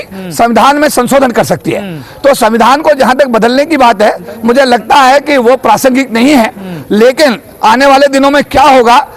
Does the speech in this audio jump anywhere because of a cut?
no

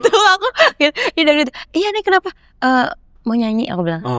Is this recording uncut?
yes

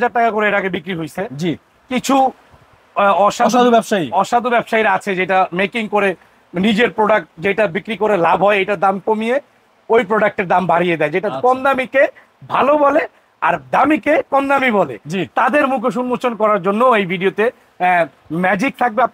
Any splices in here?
no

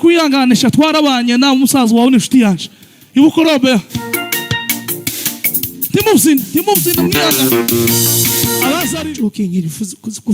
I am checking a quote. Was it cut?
yes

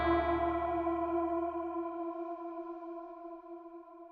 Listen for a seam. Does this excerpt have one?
no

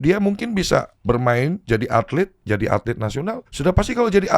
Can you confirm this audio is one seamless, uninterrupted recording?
no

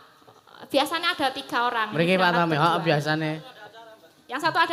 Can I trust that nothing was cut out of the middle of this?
yes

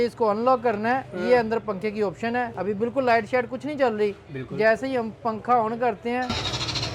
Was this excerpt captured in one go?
no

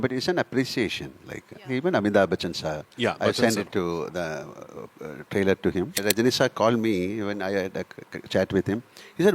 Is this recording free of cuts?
no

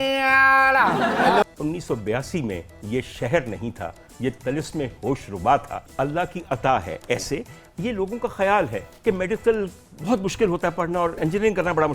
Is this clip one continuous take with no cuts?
no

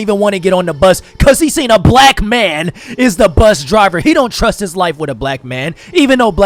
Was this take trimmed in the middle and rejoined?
no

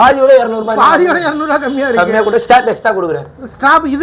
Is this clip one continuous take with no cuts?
yes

